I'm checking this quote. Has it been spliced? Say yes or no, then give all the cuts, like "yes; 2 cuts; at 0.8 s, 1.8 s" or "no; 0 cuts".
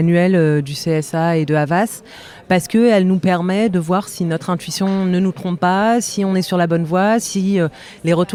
no; 0 cuts